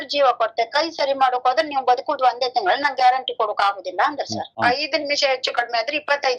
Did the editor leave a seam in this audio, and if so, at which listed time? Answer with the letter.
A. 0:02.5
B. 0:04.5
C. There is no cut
B